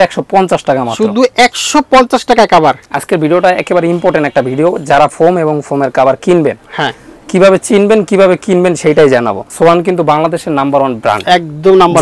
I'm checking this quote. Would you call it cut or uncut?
cut